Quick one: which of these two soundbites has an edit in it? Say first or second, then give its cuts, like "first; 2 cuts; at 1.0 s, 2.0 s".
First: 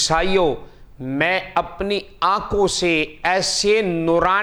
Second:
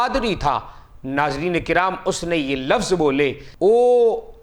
second; 1 cut; at 3.4 s